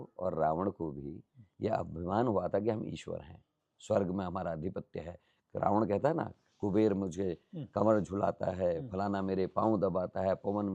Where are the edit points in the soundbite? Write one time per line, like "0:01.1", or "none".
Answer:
none